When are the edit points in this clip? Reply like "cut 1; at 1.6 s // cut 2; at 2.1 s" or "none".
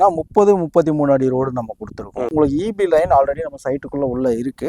cut 1; at 2.3 s